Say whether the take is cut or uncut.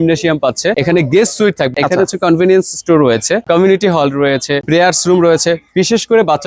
uncut